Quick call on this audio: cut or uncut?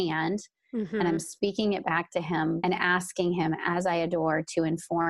cut